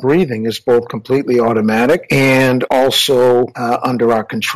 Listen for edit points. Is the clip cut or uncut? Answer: cut